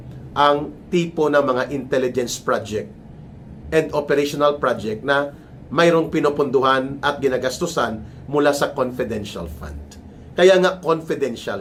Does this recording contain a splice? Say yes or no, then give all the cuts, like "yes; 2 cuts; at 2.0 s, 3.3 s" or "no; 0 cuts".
no; 0 cuts